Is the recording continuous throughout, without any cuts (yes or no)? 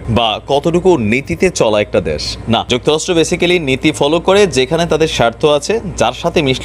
yes